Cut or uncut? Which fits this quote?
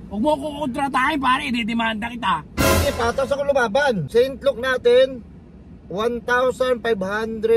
cut